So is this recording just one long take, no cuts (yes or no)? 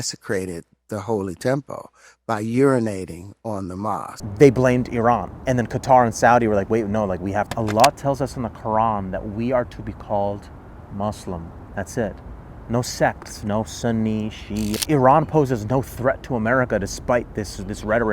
no